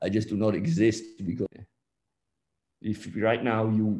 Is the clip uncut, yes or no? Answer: no